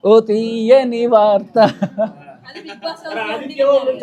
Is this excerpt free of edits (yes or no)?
yes